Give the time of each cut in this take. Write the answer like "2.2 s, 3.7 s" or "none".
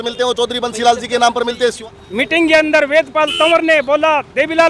1.6 s